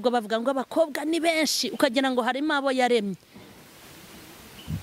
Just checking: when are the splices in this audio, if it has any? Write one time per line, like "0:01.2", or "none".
none